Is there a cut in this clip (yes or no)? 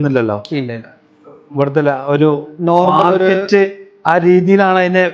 no